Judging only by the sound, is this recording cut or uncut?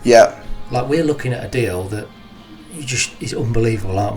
uncut